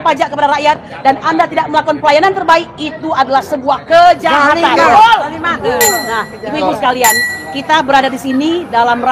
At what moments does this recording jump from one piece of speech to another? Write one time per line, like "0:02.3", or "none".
none

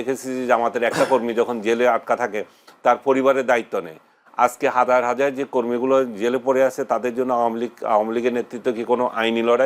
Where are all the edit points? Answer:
none

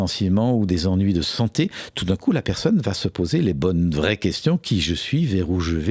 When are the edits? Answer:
none

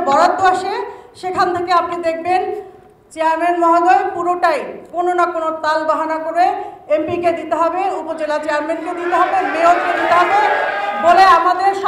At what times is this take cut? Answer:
none

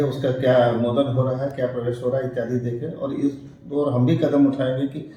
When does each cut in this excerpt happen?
none

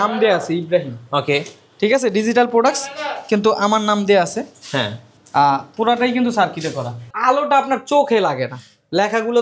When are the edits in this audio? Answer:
0:07.1

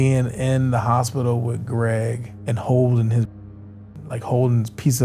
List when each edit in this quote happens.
none

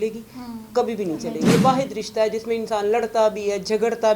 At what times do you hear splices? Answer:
0:01.5

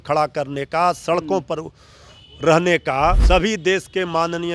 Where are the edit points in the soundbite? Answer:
0:03.2

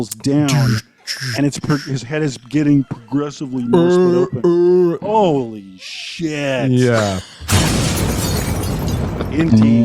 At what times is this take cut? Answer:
0:07.3

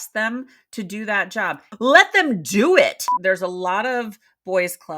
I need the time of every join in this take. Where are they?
0:01.7
0:03.1

